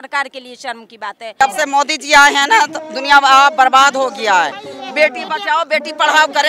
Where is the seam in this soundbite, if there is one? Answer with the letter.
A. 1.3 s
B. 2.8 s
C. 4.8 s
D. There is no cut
A